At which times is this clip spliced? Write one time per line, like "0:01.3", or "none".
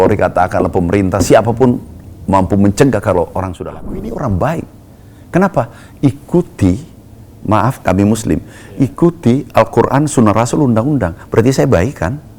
0:03.5